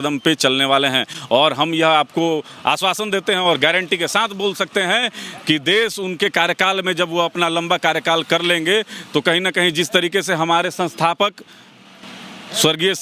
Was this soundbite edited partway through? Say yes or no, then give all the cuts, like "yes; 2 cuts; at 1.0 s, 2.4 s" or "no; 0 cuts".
no; 0 cuts